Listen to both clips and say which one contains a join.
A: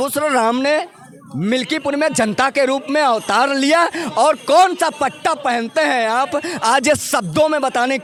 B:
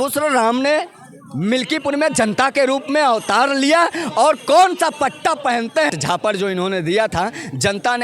B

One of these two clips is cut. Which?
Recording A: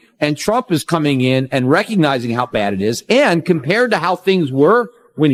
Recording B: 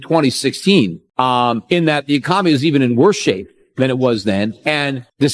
B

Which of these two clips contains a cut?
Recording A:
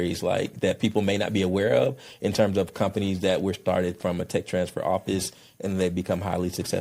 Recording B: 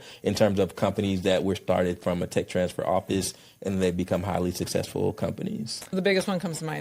B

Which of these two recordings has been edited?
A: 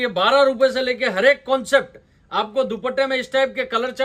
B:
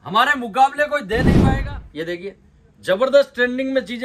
B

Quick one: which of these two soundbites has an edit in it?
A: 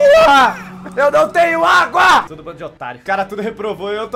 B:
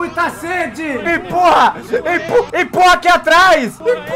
A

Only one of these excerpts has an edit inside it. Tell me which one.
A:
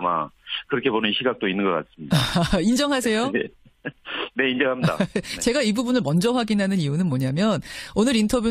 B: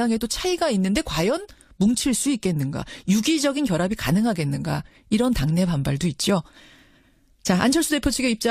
B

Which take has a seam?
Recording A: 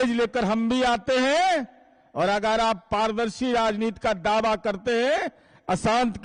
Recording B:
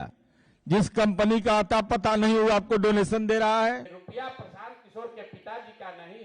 B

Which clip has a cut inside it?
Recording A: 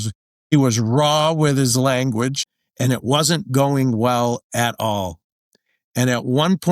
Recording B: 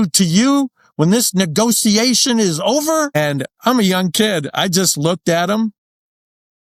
A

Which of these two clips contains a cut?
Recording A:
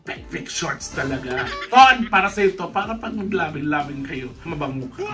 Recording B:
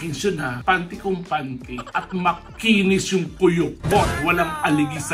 A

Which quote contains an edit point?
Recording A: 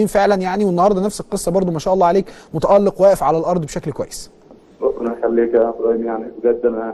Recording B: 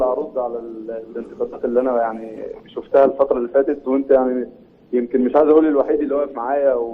B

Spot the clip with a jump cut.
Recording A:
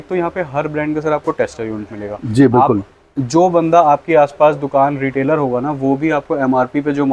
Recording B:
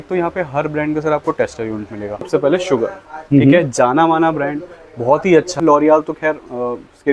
B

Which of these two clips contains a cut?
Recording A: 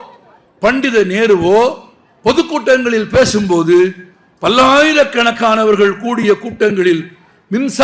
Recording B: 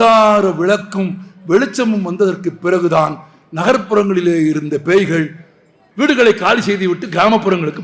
B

